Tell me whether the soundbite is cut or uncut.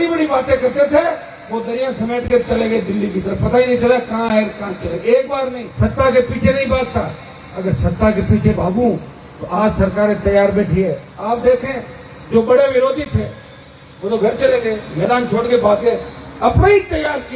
cut